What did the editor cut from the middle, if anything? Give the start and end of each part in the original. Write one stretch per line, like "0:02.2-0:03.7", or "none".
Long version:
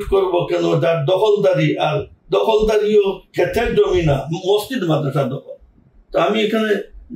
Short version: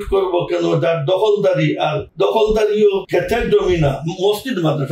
0:02.0-0:02.2
0:03.2-0:03.3

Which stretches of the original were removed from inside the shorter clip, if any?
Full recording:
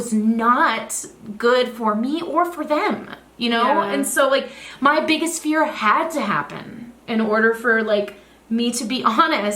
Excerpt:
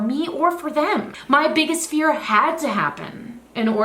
0:03.1-0:04.7

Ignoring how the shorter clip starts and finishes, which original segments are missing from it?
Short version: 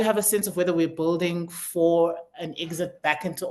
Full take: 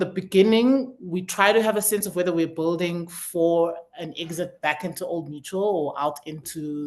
none

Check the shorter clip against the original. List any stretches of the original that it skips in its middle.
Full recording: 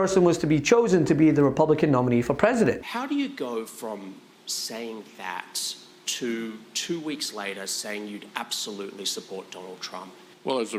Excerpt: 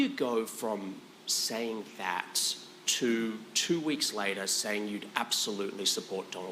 none

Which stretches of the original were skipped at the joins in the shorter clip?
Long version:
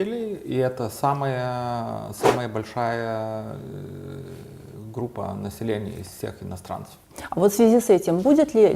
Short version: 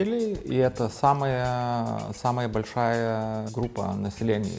0:03.5-0:04.9

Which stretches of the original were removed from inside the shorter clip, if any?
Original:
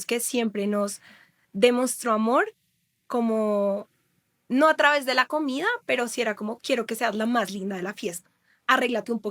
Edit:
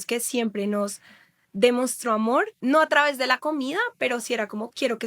0:02.5-0:04.4

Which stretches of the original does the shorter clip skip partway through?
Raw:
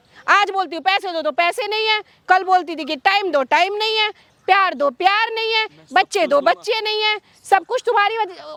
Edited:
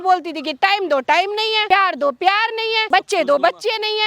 0:04.0-0:04.4
0:05.6-0:05.8

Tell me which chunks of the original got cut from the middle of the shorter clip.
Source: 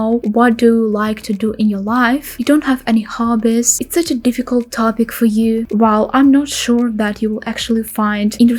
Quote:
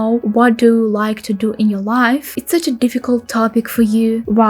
0:02.3-0:03.8

